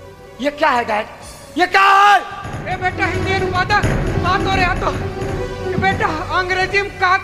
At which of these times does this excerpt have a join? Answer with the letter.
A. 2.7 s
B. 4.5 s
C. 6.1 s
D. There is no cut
D